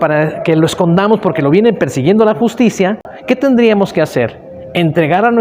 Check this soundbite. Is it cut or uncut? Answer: cut